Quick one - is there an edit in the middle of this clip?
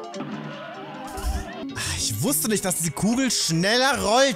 yes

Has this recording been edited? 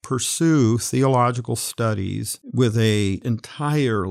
yes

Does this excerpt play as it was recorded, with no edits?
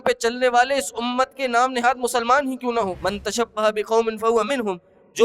no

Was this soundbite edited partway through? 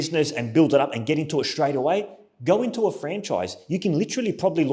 no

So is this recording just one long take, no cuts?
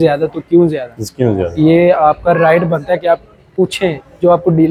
yes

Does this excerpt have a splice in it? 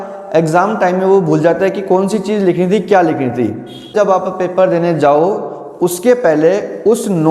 yes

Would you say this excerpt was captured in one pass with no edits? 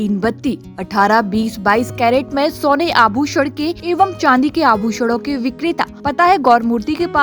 no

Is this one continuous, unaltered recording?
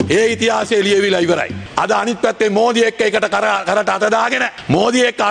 no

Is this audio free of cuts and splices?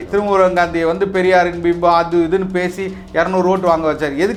yes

